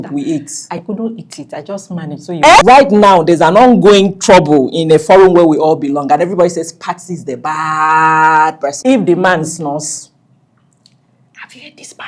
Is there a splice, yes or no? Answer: yes